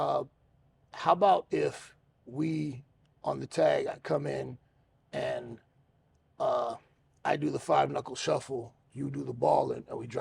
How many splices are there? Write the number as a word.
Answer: zero